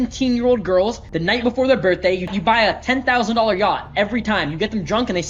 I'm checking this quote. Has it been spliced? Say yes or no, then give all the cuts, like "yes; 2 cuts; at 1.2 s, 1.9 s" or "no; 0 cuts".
yes; 2 cuts; at 1.1 s, 2.3 s